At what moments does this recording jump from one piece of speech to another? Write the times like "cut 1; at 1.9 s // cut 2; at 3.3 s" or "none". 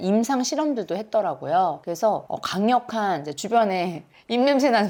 none